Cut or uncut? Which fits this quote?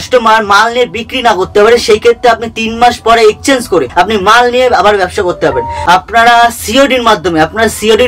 cut